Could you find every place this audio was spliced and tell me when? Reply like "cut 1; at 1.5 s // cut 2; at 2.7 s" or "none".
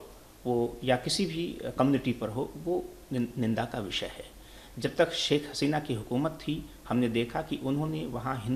none